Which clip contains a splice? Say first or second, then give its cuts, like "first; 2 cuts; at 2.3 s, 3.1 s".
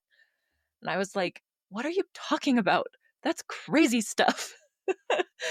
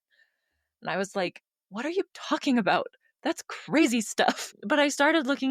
second; 1 cut; at 4.6 s